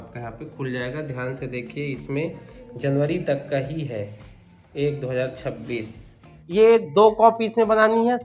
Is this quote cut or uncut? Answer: cut